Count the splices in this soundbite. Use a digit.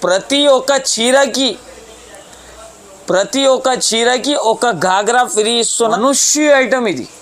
1